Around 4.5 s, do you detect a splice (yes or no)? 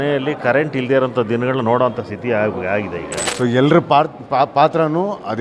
no